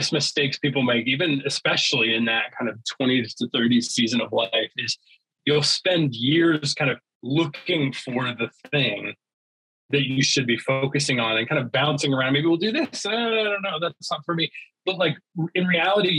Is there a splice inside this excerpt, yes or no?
no